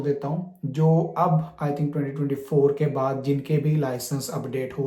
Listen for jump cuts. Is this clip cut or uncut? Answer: uncut